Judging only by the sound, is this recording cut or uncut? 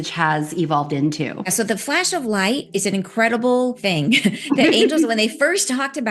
cut